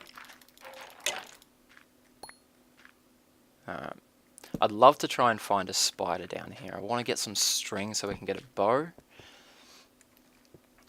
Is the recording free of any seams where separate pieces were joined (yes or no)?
yes